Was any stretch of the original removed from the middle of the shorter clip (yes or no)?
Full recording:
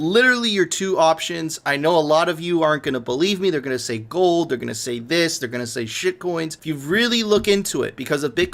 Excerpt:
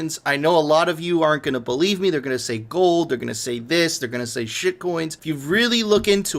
no